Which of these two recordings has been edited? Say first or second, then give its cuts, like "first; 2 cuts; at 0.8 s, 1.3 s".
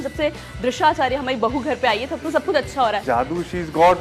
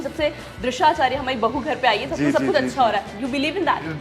first; 1 cut; at 3.0 s